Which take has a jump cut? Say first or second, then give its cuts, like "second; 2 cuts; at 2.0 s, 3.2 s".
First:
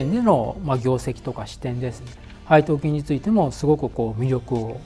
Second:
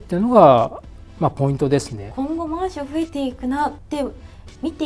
second; 2 cuts; at 2.0 s, 3.8 s